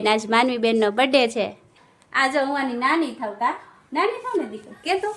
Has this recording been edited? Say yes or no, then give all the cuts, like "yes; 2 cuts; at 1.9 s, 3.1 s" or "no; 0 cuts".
yes; 1 cut; at 1.6 s